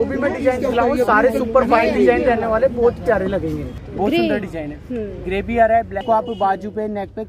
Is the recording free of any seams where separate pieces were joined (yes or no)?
no